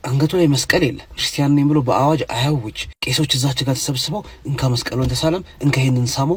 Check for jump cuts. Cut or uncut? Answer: uncut